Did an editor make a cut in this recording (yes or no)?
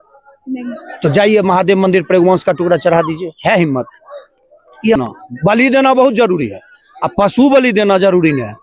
yes